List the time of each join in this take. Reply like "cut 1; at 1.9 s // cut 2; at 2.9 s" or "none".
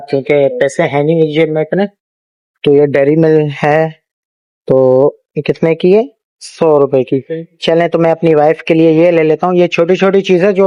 none